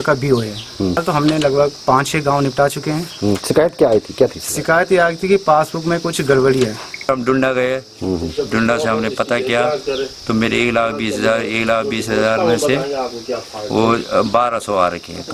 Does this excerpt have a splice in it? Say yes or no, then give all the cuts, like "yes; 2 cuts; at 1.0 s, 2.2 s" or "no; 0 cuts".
yes; 2 cuts; at 1.0 s, 7.1 s